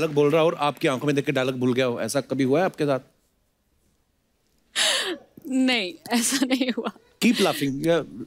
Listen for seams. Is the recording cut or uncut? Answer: uncut